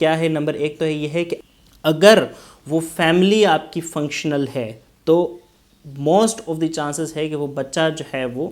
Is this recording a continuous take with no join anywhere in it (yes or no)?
no